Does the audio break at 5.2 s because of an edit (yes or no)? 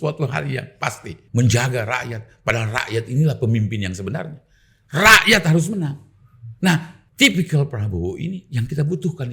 no